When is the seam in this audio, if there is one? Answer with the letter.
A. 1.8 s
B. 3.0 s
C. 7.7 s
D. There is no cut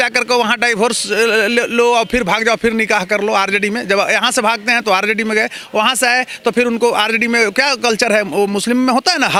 D